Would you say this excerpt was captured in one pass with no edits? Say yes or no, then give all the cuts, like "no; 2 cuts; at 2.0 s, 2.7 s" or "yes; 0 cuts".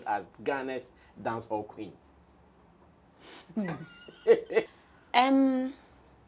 no; 1 cut; at 4.7 s